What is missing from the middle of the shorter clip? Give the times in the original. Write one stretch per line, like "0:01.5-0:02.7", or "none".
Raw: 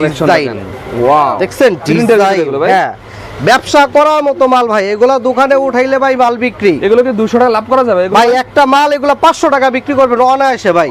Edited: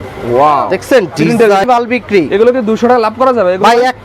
0:02.3-0:06.2